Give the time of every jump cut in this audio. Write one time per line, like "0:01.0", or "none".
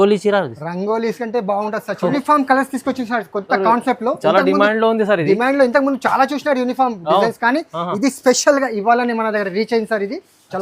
0:02.1